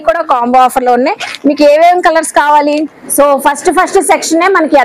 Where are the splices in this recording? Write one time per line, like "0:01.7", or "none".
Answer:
0:02.7

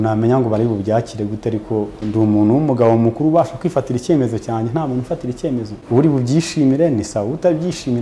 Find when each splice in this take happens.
0:02.0
0:05.8

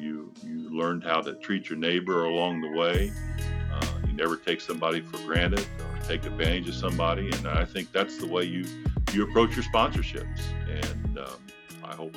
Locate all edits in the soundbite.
none

